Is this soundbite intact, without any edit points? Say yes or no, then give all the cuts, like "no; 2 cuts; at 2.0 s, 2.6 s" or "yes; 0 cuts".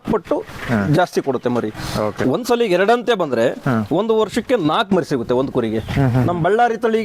no; 1 cut; at 2.2 s